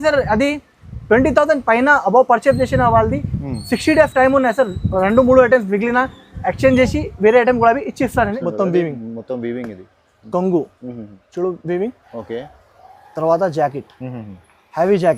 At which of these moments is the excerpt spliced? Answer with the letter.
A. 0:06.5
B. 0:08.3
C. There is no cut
B